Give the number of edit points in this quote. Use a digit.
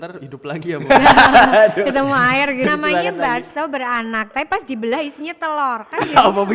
1